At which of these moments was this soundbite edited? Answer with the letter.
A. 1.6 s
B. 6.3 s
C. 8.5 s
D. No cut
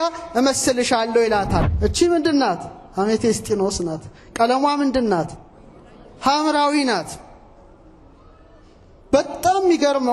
A